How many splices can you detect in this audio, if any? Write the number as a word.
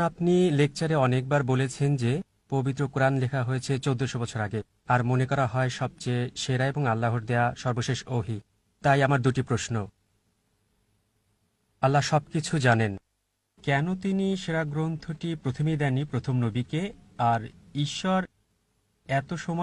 zero